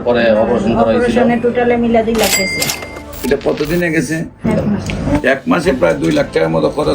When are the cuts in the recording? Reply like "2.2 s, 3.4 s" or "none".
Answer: 4.4 s